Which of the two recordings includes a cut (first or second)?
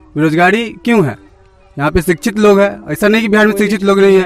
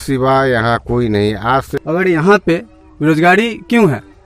second